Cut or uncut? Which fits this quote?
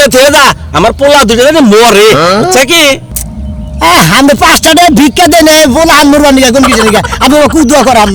uncut